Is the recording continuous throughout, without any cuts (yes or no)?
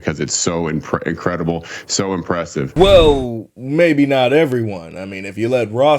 yes